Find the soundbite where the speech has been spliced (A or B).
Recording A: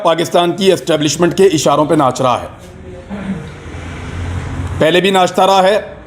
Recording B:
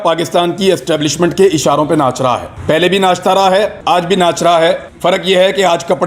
B